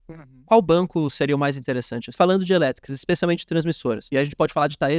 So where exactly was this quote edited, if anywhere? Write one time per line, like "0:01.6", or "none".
0:02.1
0:04.0